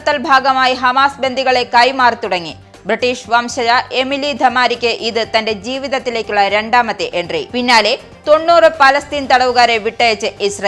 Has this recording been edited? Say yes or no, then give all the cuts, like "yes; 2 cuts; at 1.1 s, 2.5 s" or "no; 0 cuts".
no; 0 cuts